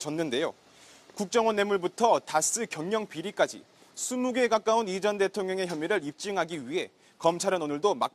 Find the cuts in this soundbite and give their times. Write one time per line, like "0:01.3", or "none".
0:02.0